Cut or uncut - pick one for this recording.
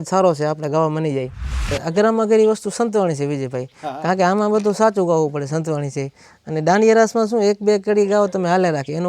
cut